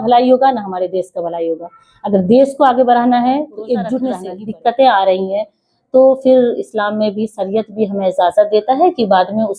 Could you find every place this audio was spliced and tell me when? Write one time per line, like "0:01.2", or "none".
0:04.3